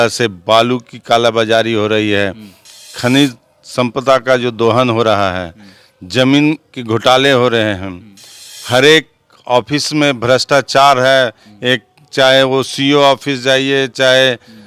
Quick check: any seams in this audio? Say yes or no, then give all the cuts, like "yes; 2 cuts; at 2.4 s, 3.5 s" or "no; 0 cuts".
no; 0 cuts